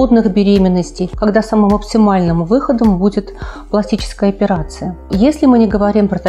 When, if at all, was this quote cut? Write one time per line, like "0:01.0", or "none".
0:01.0
0:05.1